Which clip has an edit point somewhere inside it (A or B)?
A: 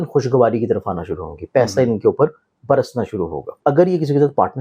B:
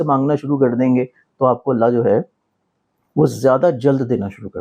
A